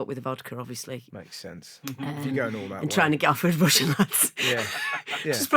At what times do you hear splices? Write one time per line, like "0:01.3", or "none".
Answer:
0:01.1